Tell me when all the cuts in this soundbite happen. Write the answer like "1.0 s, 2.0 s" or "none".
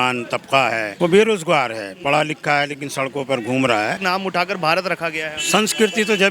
0.9 s, 4.0 s